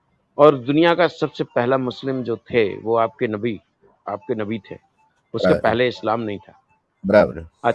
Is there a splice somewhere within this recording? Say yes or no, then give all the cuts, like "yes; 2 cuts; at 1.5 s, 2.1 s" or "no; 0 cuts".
no; 0 cuts